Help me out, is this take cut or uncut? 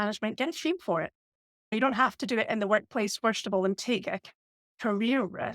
cut